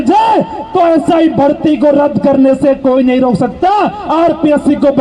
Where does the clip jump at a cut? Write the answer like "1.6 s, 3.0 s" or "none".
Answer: none